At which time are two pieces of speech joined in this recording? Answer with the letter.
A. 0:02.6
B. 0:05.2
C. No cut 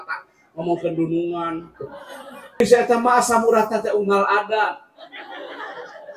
A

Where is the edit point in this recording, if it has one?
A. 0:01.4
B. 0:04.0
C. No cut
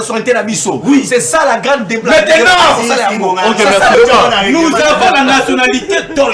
B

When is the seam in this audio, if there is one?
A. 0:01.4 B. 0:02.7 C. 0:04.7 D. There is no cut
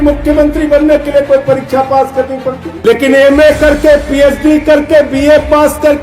B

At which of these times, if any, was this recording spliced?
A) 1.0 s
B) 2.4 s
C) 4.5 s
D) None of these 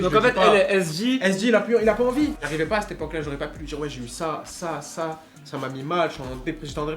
B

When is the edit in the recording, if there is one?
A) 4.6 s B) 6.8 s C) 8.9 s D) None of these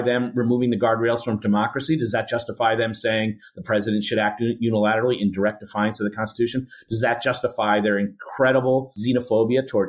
C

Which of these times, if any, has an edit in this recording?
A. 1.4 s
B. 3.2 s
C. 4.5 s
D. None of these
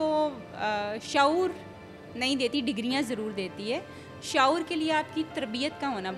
D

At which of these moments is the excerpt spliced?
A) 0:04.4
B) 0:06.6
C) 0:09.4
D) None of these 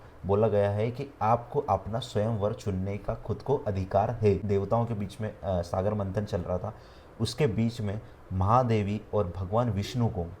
A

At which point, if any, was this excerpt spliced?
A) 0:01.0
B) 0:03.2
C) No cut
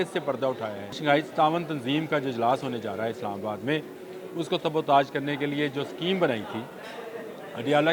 A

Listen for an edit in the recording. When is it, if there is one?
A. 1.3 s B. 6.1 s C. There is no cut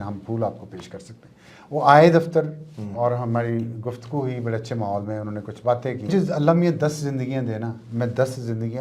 B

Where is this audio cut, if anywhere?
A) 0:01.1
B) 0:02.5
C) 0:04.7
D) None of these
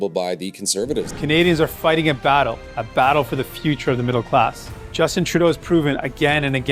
A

